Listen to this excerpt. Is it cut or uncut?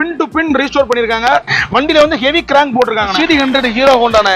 cut